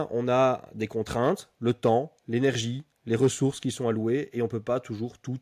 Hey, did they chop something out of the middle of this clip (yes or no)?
no